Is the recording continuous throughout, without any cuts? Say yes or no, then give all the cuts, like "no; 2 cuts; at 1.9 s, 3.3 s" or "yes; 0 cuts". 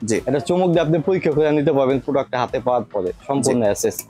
yes; 0 cuts